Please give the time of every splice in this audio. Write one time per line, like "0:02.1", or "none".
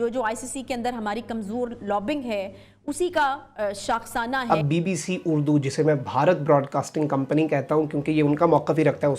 0:04.4